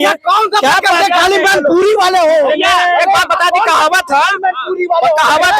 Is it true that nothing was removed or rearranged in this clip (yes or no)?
yes